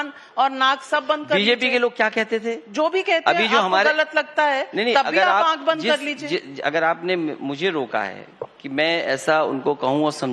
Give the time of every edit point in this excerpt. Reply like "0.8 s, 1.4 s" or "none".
9.2 s

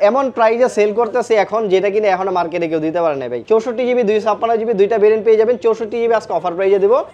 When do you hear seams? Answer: none

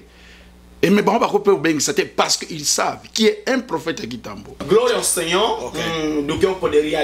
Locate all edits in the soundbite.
4.6 s

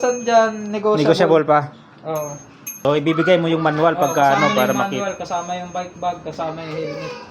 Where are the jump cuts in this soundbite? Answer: 2.8 s

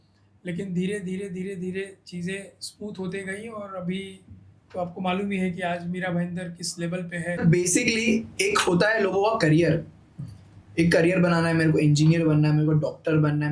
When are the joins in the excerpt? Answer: none

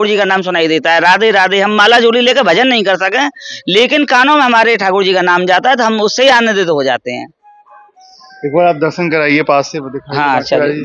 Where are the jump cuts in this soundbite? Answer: none

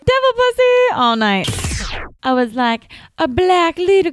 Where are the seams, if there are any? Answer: 1.6 s

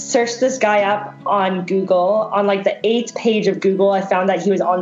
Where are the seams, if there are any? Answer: none

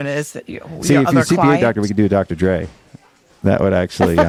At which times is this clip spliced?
none

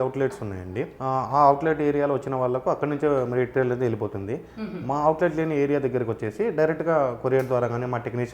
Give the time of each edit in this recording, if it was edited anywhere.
0.9 s

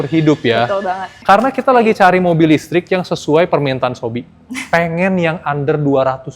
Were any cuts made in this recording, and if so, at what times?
1.1 s

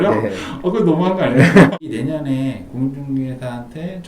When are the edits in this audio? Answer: 1.7 s

